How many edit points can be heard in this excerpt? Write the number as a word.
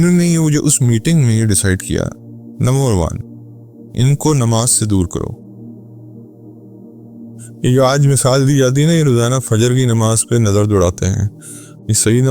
two